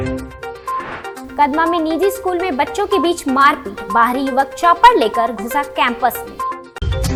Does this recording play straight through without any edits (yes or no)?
yes